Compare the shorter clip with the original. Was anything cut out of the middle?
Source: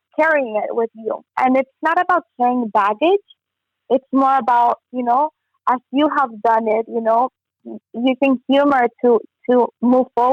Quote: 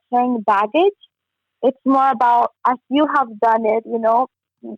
yes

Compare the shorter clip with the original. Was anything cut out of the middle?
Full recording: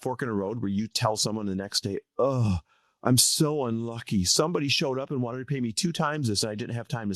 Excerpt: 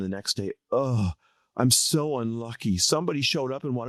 no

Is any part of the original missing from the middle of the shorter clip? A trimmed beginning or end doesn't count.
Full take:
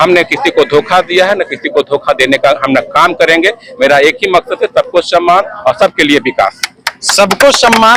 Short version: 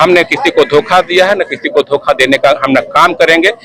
no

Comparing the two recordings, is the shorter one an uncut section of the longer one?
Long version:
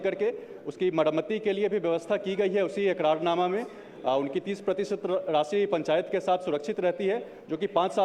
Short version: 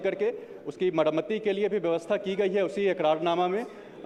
yes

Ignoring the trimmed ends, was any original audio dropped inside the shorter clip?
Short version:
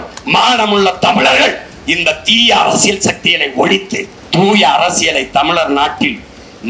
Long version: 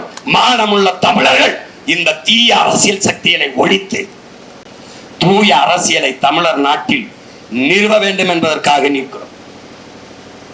yes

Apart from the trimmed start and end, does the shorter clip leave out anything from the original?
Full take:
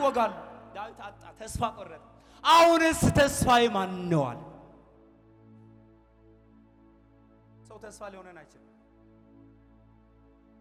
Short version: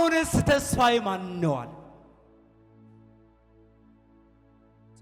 no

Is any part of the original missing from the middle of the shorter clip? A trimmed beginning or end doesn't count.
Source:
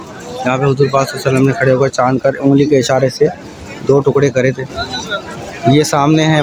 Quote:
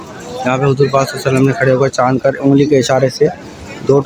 no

